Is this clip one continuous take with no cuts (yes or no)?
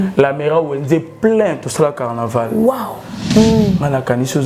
no